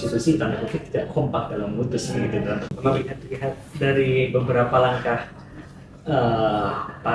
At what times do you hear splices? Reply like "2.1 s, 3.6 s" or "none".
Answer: 2.7 s